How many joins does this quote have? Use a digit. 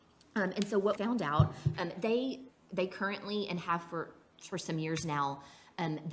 1